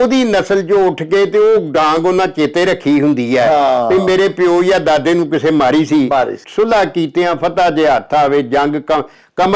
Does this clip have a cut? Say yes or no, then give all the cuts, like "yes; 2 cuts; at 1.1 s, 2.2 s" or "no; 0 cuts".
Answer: yes; 1 cut; at 6.4 s